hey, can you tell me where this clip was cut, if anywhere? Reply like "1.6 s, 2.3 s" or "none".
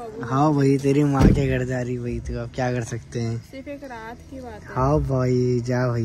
none